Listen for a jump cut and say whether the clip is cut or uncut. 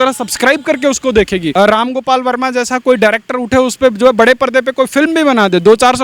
cut